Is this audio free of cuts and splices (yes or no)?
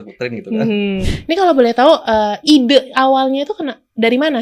no